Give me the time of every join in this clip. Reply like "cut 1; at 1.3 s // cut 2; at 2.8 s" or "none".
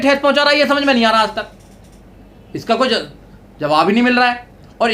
none